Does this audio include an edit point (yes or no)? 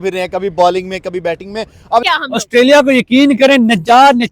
yes